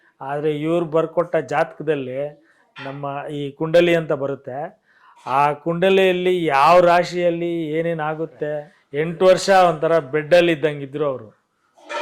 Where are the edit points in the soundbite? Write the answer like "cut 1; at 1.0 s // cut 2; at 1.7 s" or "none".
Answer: cut 1; at 8.8 s